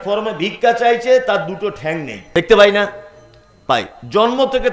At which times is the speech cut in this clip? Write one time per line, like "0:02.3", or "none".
0:02.2

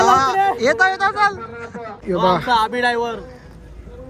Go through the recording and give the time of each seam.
0:02.0

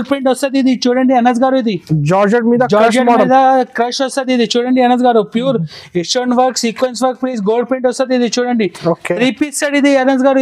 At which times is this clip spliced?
none

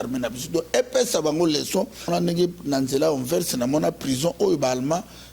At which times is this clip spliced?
0:02.1

